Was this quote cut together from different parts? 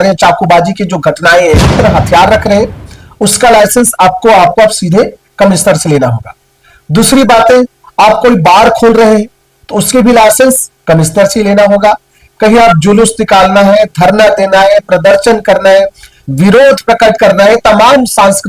yes; 1 cut; at 1.7 s

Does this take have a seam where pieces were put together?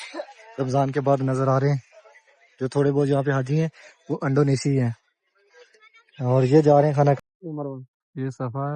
yes; 1 cut; at 7.2 s

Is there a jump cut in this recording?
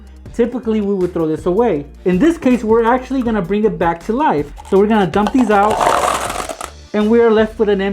yes; 1 cut; at 4.5 s

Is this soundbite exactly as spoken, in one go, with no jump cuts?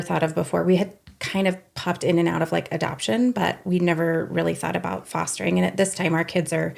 yes; 0 cuts

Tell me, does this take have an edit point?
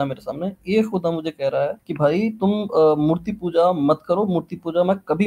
yes; 1 cut; at 1.8 s

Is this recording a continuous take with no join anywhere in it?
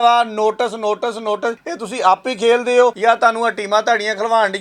no; 2 cuts; at 1.7 s, 3.0 s

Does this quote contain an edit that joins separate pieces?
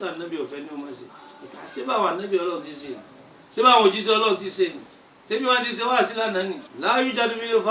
yes; 1 cut; at 6.7 s

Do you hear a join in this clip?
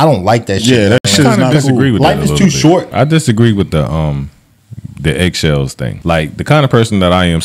yes; 2 cuts; at 2.9 s, 5.9 s

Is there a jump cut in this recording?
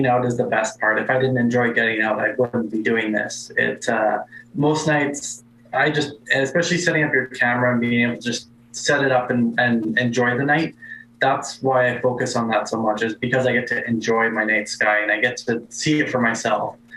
no; 0 cuts

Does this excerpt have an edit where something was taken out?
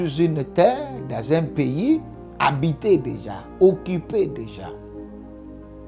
no; 0 cuts

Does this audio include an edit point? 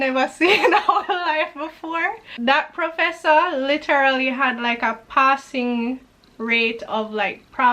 yes; 1 cut; at 2.3 s

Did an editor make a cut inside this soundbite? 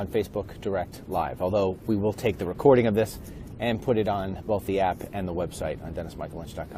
no; 0 cuts

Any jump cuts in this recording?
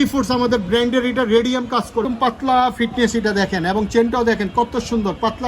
yes; 1 cut; at 2.0 s

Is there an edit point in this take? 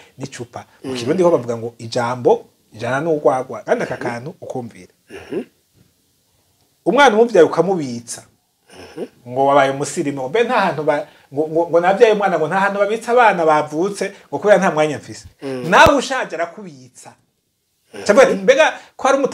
yes; 1 cut; at 3.5 s

